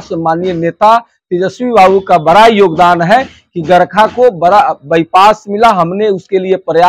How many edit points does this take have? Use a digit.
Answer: 0